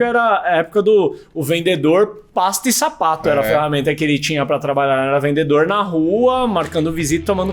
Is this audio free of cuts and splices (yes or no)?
yes